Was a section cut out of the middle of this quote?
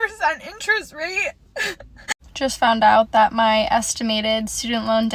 yes; 1 cut; at 2.2 s

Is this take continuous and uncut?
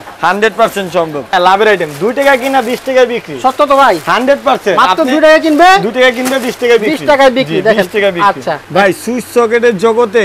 no; 2 cuts; at 1.3 s, 8.5 s

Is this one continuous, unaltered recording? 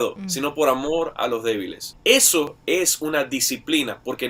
yes; 0 cuts

